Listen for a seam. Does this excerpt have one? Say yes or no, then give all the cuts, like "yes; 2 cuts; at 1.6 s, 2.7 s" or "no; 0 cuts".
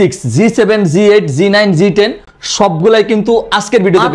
no; 0 cuts